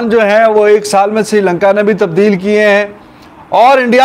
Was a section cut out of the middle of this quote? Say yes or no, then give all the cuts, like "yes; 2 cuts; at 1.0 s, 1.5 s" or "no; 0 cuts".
no; 0 cuts